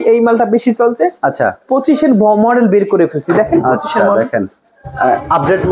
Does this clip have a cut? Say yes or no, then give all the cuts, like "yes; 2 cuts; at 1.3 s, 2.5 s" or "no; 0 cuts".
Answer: no; 0 cuts